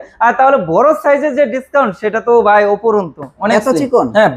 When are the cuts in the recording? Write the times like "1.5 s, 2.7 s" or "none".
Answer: 3.3 s